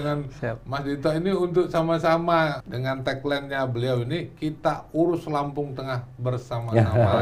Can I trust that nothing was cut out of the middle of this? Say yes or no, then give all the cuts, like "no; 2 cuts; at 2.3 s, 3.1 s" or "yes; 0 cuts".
no; 1 cut; at 2.7 s